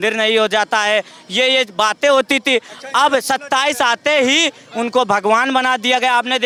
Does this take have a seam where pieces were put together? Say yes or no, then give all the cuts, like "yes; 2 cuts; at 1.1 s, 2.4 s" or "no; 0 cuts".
no; 0 cuts